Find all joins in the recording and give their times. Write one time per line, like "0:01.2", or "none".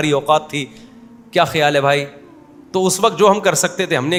none